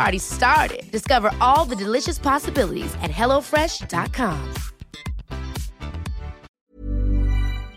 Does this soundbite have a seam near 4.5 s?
no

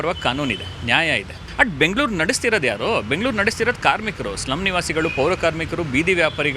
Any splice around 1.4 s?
yes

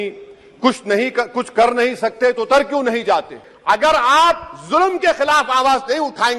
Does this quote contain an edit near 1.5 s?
no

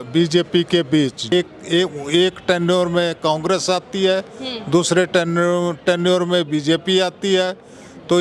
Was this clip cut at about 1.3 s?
yes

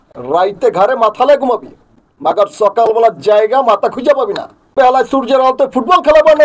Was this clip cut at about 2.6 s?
no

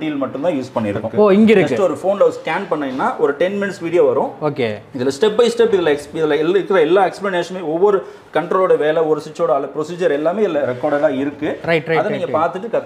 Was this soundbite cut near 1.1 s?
yes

